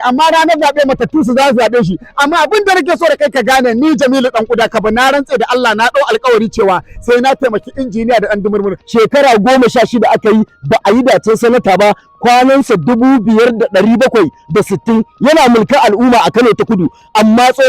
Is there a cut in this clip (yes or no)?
yes